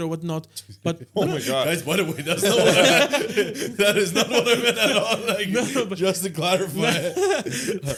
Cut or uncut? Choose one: uncut